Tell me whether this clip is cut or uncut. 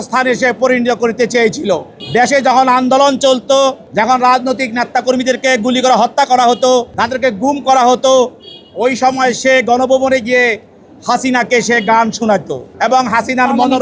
cut